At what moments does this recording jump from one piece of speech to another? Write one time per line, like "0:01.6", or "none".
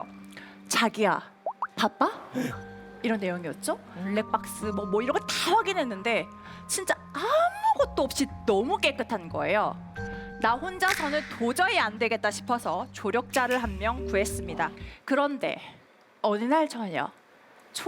0:04.0
0:14.9